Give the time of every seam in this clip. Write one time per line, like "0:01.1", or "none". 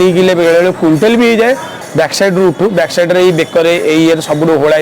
0:01.7